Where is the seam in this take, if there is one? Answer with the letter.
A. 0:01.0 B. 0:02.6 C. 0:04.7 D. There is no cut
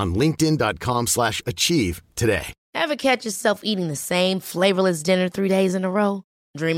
B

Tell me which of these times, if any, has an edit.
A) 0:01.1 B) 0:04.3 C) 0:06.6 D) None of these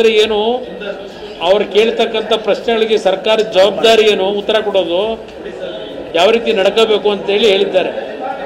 D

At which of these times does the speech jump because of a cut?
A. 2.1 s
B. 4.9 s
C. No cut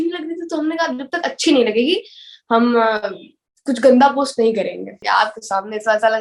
B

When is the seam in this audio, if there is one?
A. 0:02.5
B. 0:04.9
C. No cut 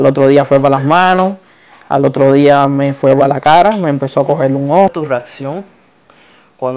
B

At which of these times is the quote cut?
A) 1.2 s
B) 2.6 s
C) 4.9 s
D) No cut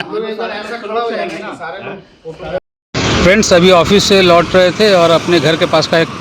B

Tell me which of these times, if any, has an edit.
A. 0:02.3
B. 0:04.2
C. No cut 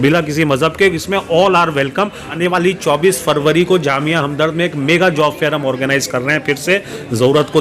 A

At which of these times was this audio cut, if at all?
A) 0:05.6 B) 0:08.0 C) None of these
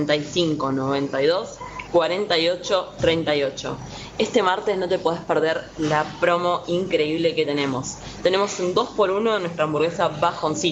C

